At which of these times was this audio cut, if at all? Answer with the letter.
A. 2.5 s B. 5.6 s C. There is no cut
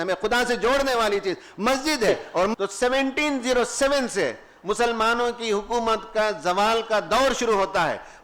A